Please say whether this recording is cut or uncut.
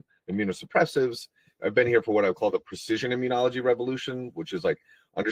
uncut